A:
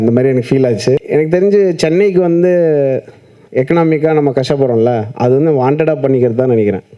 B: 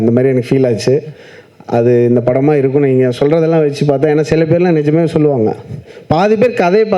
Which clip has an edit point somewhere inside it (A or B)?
A